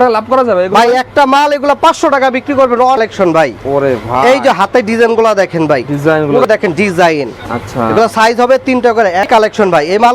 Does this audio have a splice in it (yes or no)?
yes